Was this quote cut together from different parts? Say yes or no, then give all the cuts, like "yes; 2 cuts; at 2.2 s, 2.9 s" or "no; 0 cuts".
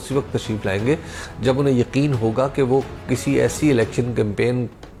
no; 0 cuts